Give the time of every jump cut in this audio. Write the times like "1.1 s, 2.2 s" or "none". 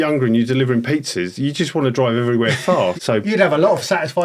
2.9 s